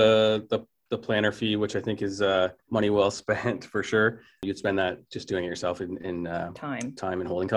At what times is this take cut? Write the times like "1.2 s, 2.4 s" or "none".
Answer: 2.6 s, 4.4 s